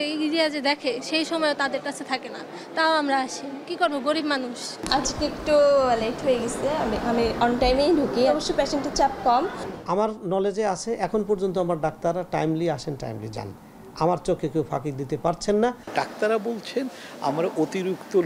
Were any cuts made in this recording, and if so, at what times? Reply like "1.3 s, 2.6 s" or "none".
4.7 s, 9.7 s, 15.8 s

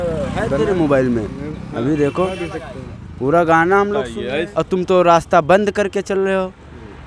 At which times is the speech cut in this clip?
4.4 s

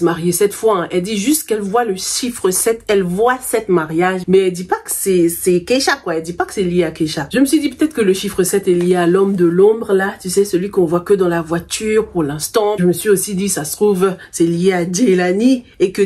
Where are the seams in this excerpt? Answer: none

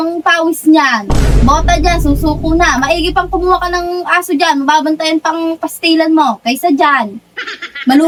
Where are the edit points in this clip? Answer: none

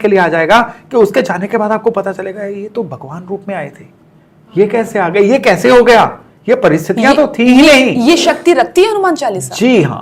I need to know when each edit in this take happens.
none

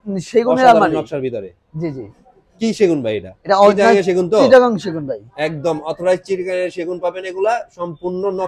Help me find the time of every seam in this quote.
none

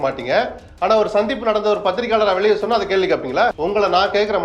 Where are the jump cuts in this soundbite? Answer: 3.6 s

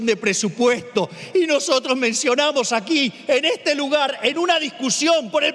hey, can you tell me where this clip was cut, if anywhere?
none

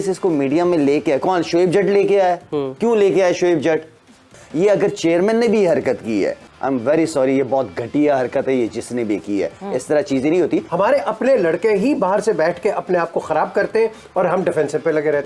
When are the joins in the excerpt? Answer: 4.3 s, 10.7 s

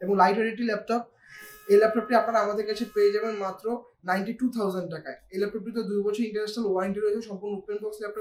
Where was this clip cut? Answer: none

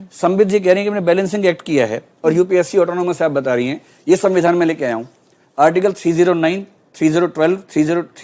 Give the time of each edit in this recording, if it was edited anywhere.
none

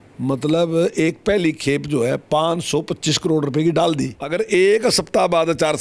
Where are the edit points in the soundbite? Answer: 4.2 s

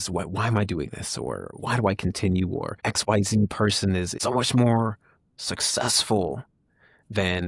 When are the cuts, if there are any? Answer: 1.5 s, 2.8 s, 4.1 s

